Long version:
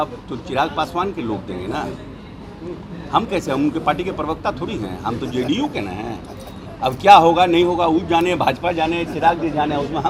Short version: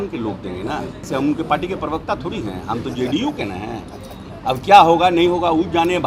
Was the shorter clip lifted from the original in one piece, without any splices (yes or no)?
no